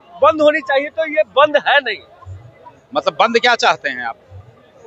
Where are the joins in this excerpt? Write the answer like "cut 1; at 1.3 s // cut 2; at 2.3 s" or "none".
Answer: none